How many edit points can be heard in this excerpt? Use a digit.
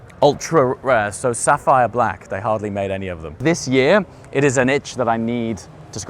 1